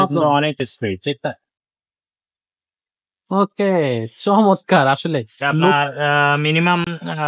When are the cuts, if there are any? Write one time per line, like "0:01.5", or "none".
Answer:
none